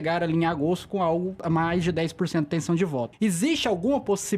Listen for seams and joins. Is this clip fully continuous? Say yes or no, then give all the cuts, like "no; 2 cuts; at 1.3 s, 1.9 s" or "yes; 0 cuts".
no; 2 cuts; at 1.4 s, 3.1 s